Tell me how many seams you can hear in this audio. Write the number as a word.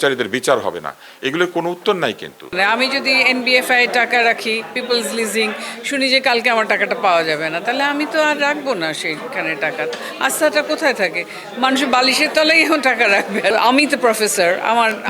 two